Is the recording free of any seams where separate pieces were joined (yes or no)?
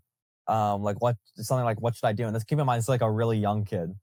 yes